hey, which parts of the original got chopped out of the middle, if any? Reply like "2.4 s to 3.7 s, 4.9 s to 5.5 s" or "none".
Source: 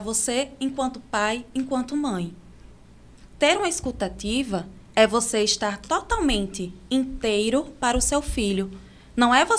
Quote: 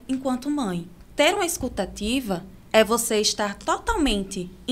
2.4 s to 3.2 s